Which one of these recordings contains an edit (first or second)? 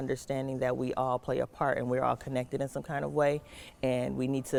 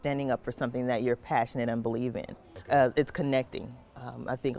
second